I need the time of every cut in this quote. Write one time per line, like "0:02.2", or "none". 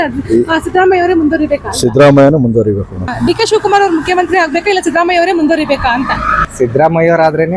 0:03.1
0:06.4